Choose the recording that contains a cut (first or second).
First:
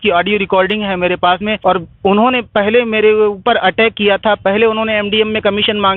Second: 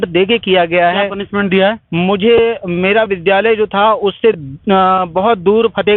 first